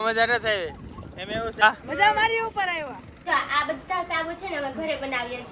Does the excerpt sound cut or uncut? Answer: cut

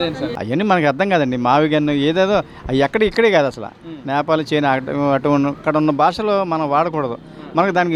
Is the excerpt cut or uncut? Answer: uncut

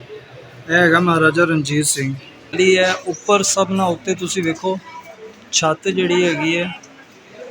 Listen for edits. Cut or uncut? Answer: cut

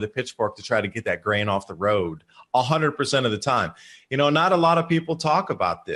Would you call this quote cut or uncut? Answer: uncut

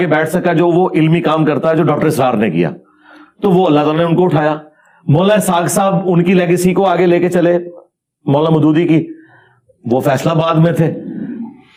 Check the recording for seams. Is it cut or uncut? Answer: uncut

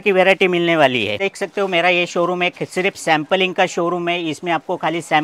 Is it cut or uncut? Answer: cut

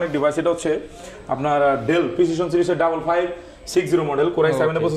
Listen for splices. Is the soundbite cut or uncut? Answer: uncut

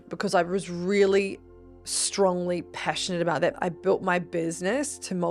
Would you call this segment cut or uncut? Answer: cut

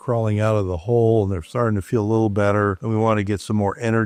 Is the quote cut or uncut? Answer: uncut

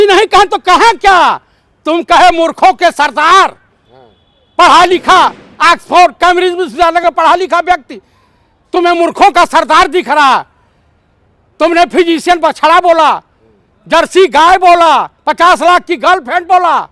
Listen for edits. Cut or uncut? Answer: uncut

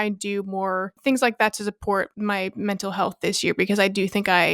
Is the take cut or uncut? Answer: cut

